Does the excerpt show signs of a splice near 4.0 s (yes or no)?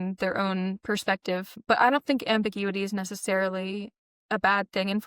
no